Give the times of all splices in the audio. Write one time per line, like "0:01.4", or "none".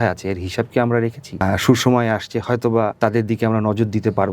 0:01.4
0:02.9